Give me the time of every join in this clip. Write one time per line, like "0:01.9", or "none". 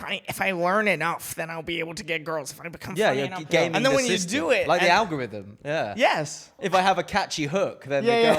0:06.6